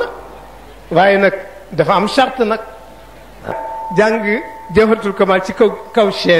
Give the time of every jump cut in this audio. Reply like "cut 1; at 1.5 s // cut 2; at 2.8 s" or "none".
cut 1; at 3.7 s